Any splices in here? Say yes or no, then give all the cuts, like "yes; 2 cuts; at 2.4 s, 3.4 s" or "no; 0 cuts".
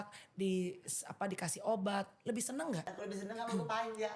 yes; 1 cut; at 2.9 s